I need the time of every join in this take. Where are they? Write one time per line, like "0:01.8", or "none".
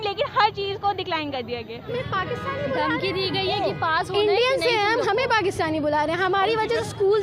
0:01.9